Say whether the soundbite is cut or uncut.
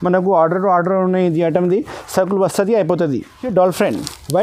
cut